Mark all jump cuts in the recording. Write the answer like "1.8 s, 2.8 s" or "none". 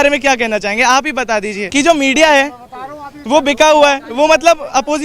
1.6 s